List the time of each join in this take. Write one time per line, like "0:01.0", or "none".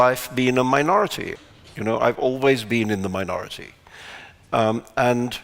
0:01.3

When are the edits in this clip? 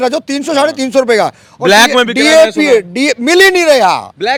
none

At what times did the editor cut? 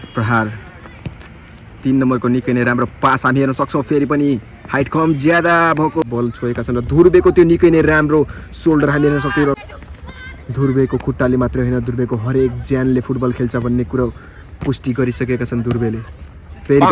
0:06.0
0:09.7

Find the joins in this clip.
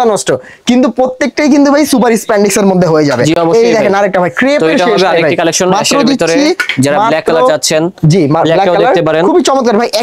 none

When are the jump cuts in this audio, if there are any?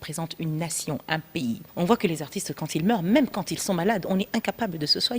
0:01.6

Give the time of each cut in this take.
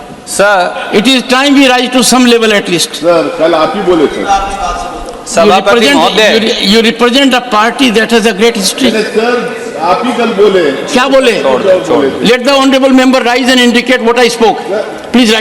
none

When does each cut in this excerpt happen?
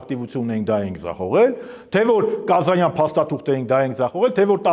none

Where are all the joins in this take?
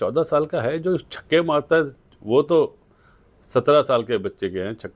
none

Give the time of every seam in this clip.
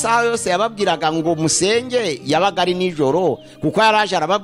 none

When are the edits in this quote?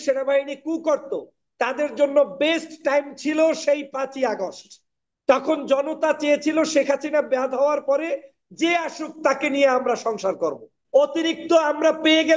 0:10.7

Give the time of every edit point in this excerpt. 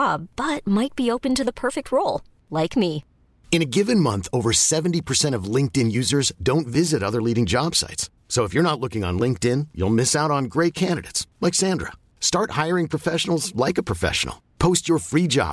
none

